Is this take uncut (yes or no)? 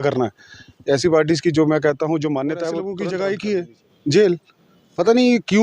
no